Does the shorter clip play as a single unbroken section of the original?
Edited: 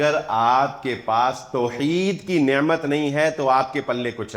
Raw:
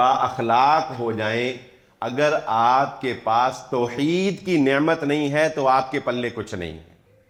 yes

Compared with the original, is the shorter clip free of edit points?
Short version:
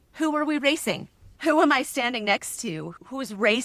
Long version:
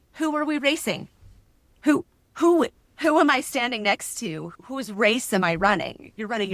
no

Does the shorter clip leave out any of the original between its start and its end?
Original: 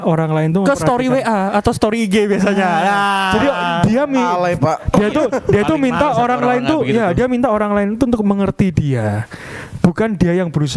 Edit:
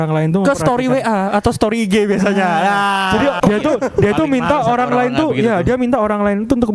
yes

